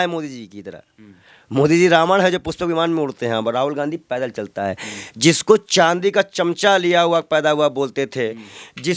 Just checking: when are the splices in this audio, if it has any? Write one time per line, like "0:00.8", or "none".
none